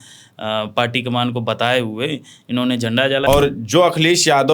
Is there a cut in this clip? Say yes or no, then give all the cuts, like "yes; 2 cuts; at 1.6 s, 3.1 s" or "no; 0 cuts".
yes; 1 cut; at 3.2 s